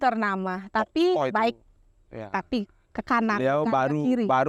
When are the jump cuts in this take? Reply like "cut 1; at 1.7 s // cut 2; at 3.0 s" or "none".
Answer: none